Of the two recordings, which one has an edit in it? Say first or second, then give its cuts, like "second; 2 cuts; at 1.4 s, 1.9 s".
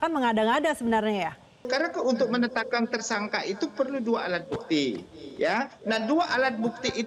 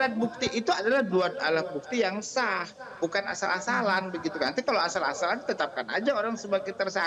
first; 1 cut; at 1.6 s